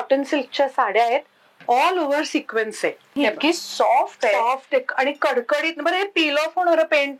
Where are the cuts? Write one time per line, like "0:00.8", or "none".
0:03.1